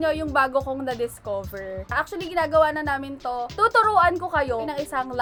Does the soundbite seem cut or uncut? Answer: uncut